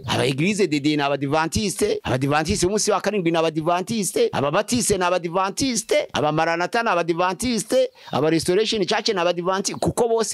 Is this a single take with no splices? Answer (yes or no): no